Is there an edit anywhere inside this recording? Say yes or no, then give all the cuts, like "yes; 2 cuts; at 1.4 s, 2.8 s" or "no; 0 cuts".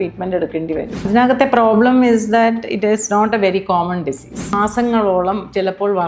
yes; 2 cuts; at 1.1 s, 4.5 s